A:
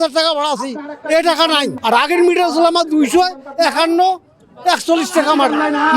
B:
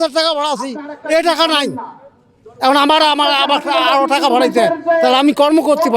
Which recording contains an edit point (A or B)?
A